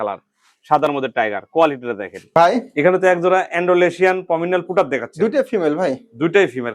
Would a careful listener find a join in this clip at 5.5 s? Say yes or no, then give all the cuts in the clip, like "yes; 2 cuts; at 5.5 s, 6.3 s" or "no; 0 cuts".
no; 1 cut; at 2.3 s